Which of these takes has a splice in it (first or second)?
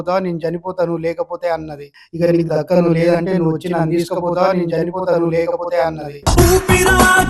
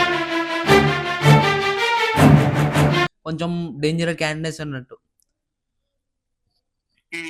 second